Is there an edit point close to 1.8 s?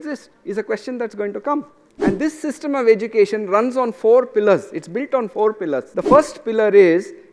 yes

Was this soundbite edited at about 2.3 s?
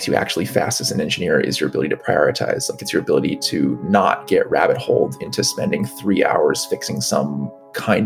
no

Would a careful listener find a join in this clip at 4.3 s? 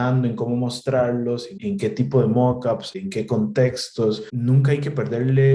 yes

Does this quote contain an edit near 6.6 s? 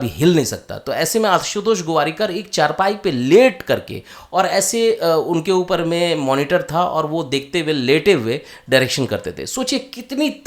no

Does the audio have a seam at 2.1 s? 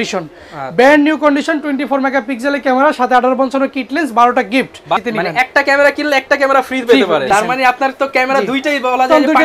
no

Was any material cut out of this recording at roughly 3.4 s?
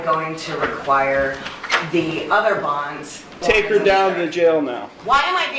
yes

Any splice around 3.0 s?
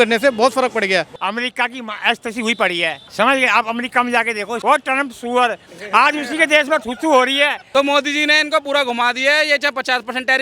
yes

